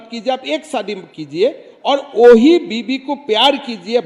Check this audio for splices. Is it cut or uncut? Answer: uncut